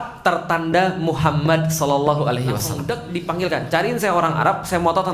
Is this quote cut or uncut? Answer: cut